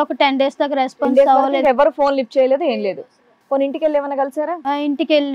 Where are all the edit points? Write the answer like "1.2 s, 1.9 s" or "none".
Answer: none